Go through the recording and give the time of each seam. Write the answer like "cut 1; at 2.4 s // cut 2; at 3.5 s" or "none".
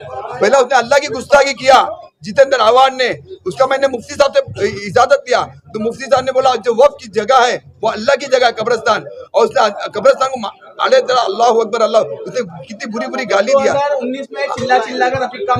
none